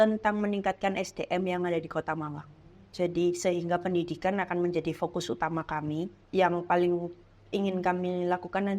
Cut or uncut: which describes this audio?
cut